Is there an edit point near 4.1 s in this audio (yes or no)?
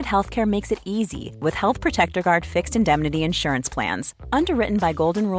no